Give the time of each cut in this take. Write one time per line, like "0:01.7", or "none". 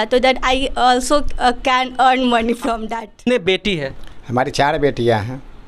0:02.8

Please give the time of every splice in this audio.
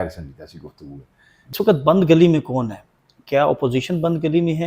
0:01.5

